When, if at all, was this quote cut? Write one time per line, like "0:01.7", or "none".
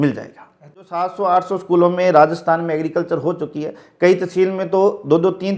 0:01.0